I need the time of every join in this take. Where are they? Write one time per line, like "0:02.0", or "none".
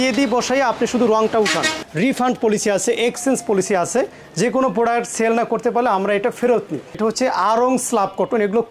0:01.8
0:06.9